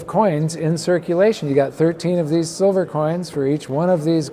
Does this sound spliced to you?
no; 0 cuts

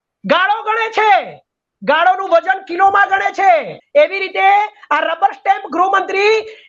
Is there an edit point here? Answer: yes; 1 cut; at 3.8 s

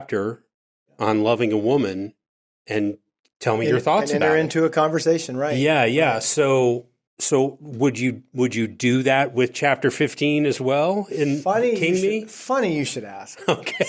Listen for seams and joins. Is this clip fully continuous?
yes; 0 cuts

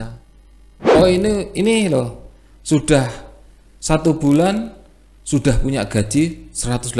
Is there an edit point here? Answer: yes; 1 cut; at 0.9 s

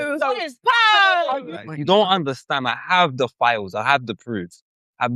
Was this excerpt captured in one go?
no; 1 cut; at 1.6 s

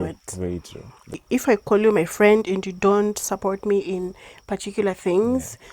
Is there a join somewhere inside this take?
yes; 1 cut; at 1.0 s

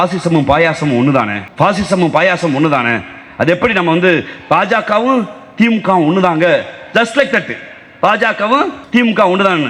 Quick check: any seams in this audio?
no; 0 cuts

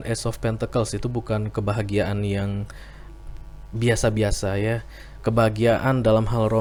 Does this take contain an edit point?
no; 0 cuts

